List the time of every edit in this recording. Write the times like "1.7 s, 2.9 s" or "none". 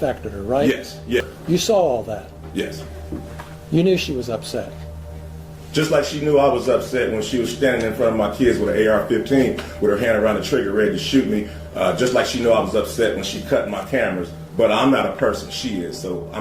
1.3 s